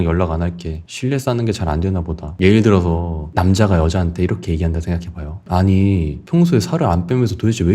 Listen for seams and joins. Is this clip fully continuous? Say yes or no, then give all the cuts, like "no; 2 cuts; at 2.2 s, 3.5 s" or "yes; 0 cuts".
no; 2 cuts; at 2.2 s, 5.3 s